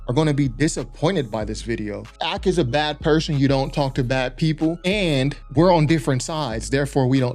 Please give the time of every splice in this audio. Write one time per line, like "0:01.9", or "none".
0:02.2
0:04.8